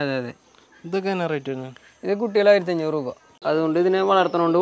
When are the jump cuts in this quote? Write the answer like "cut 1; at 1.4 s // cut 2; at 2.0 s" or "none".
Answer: cut 1; at 3.4 s